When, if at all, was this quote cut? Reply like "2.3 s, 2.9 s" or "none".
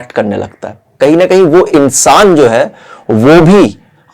0.9 s